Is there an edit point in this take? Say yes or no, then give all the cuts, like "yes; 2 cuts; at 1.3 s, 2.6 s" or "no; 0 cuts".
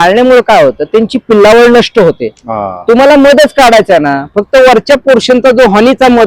no; 0 cuts